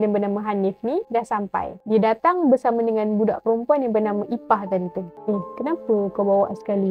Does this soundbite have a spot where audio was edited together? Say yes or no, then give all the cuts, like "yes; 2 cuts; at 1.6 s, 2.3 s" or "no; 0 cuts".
yes; 2 cuts; at 1.8 s, 5.1 s